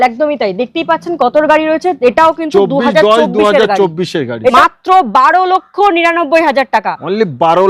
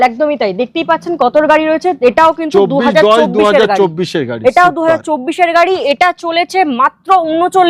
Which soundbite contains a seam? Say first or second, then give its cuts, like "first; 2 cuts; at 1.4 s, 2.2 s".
first; 1 cut; at 4.5 s